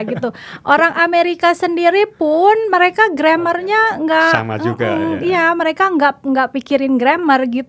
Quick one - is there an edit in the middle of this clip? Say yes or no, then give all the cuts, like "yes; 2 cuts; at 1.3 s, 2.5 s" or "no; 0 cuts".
no; 0 cuts